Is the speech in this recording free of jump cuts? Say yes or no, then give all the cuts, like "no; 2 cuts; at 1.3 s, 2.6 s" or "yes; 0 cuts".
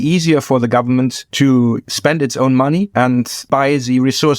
no; 3 cuts; at 1.2 s, 1.9 s, 3.1 s